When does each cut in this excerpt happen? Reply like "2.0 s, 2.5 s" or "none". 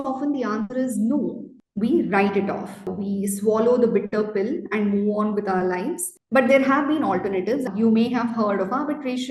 1.6 s, 2.9 s, 6.1 s, 7.7 s